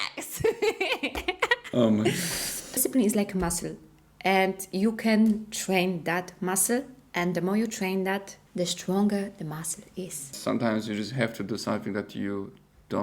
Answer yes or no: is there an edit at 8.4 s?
yes